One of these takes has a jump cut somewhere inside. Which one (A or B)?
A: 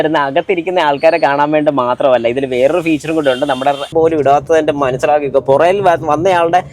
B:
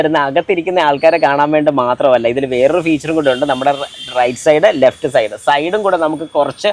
A